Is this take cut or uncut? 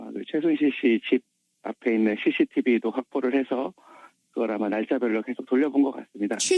cut